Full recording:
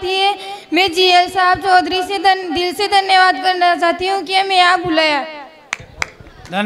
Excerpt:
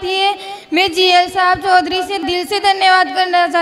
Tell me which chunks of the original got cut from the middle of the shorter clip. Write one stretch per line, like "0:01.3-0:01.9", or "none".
0:02.2-0:02.4